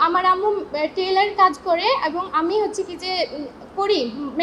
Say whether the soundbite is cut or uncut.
uncut